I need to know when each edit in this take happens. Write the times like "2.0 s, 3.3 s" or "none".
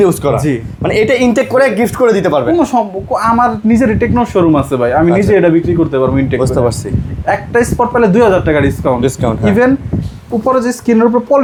none